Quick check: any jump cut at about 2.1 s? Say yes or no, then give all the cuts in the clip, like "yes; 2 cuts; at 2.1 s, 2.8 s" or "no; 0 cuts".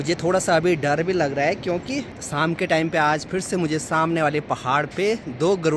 yes; 1 cut; at 2.1 s